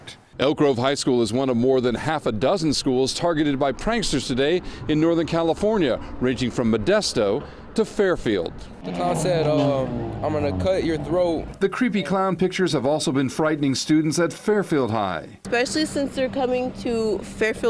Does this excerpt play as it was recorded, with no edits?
yes; 0 cuts

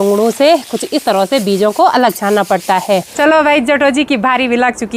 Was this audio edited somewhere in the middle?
yes; 1 cut; at 3.1 s

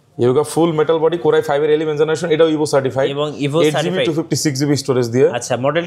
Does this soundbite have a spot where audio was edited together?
no; 0 cuts

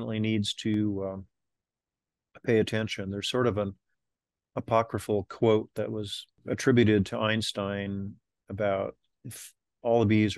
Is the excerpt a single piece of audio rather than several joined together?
no; 1 cut; at 6.4 s

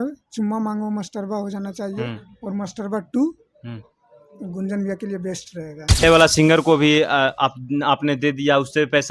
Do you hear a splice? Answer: yes; 1 cut; at 6.0 s

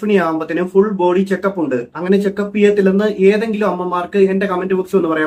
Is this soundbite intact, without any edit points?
yes; 0 cuts

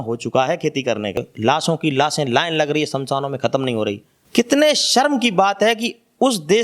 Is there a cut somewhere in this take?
yes; 2 cuts; at 1.3 s, 4.1 s

